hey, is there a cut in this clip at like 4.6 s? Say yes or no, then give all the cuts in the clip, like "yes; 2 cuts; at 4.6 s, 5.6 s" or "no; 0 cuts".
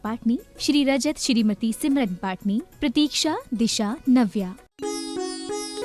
yes; 1 cut; at 4.6 s